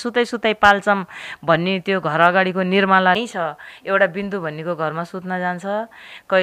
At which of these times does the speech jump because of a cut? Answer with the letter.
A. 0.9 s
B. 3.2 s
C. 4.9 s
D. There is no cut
B